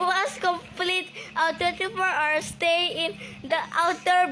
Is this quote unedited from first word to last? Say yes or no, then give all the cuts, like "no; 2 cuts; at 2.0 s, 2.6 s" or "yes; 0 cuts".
yes; 0 cuts